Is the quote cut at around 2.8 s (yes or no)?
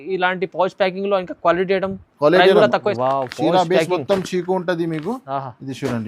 yes